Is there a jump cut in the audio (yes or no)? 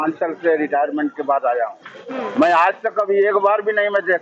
no